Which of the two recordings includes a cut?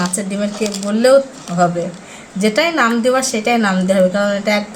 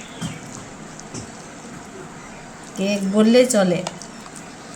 second; 1 cut; at 2.3 s

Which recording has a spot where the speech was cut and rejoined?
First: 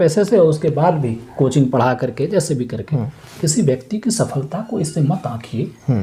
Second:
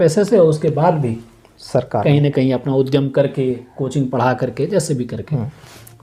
first; 2 cuts; at 1.3 s, 3.4 s

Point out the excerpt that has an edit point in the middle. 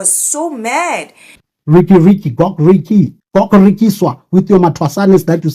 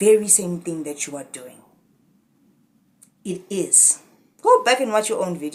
first; 1 cut; at 1.3 s

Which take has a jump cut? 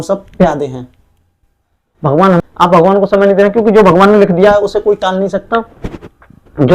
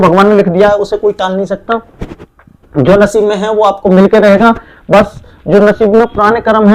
first; 1 cut; at 2.4 s

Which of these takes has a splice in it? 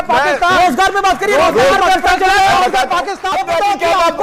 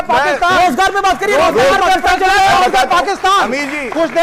first; 1 cut; at 3.3 s

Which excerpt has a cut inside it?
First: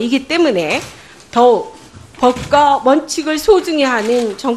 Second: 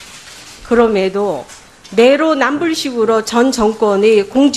first; 1 cut; at 1.9 s

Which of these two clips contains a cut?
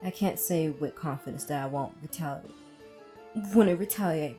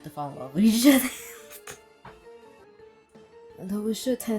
second; 1 cut; at 2.6 s

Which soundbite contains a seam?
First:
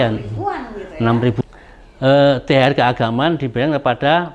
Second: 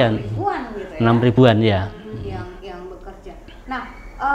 first; 1 cut; at 1.3 s

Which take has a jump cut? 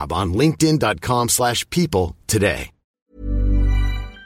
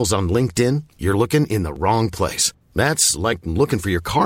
first; 1 cut; at 2.8 s

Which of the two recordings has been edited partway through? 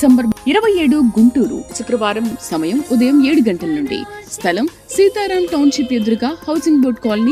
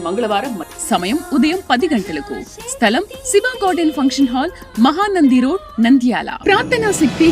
second; 1 cut; at 6.3 s

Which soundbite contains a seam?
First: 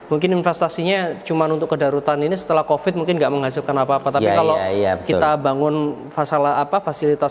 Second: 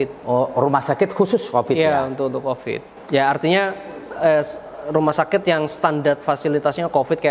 second; 1 cut; at 2.9 s

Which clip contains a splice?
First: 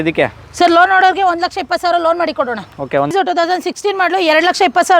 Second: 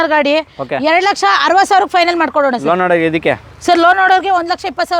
first; 1 cut; at 3.1 s

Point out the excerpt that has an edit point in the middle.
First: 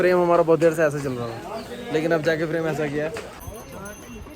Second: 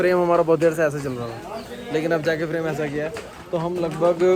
first; 1 cut; at 3.4 s

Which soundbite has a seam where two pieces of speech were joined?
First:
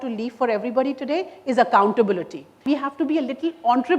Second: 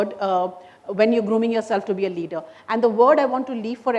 first; 1 cut; at 2.6 s

